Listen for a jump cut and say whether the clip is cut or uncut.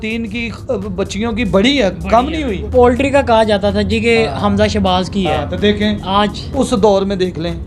cut